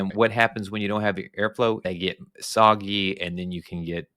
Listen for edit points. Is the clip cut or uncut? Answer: cut